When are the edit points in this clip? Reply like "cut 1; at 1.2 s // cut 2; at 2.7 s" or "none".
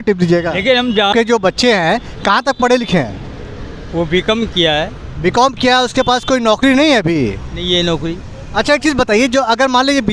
cut 1; at 1.1 s